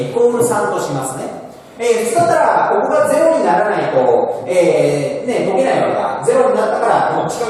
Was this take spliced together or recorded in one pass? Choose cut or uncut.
uncut